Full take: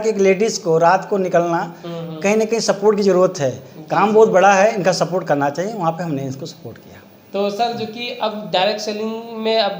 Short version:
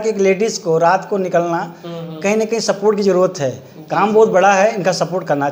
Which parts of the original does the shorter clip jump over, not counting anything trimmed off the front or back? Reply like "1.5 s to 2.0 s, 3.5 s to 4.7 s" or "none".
none